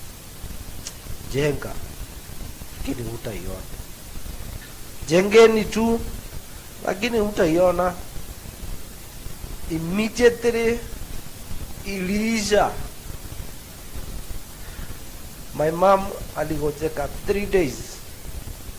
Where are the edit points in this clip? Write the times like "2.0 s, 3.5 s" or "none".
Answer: 4.6 s, 9.3 s